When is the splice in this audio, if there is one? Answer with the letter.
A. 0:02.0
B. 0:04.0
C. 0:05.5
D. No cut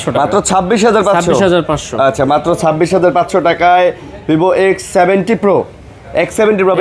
D